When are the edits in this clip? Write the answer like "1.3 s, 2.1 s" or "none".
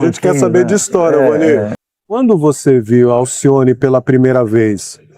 1.7 s